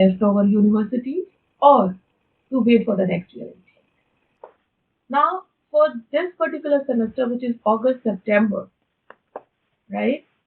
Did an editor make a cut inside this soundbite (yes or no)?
yes